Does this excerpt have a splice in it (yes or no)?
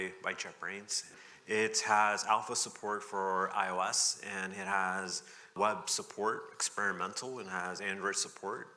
yes